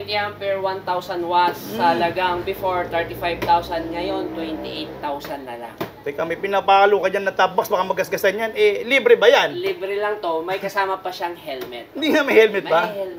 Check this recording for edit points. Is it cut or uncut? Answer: cut